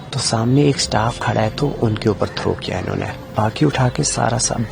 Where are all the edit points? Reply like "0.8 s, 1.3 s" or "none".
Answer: 3.2 s